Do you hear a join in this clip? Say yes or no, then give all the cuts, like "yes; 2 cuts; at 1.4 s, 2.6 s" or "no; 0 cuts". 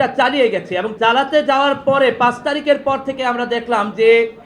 yes; 1 cut; at 0.9 s